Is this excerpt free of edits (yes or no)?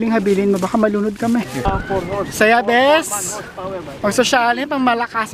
no